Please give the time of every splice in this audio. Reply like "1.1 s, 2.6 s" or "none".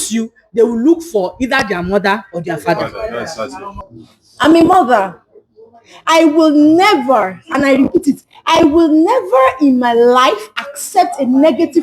3.6 s